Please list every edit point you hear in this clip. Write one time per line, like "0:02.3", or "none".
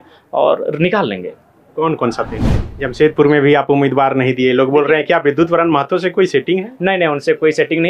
0:02.4